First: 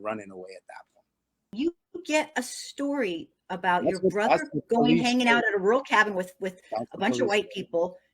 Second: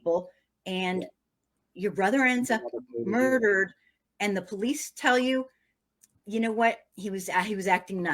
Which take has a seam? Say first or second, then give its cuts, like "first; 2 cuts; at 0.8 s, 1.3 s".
first; 1 cut; at 1.5 s